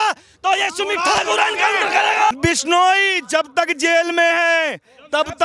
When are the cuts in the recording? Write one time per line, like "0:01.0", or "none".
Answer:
0:02.3